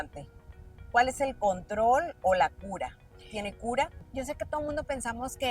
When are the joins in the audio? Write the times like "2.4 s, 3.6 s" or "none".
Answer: 4.1 s